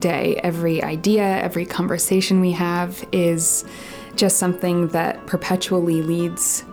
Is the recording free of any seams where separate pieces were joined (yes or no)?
yes